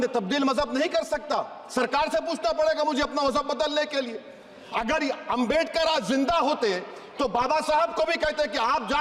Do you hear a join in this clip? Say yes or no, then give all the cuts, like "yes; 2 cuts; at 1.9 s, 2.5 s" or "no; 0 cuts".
no; 0 cuts